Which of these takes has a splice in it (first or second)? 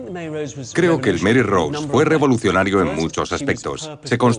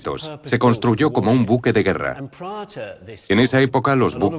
first